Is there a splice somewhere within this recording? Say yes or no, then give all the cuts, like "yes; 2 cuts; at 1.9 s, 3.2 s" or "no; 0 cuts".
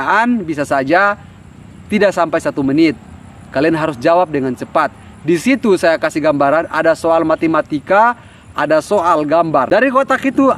yes; 1 cut; at 9.7 s